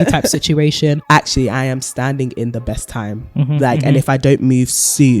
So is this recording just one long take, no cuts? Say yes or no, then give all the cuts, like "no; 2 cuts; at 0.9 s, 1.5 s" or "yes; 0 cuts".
no; 1 cut; at 1.0 s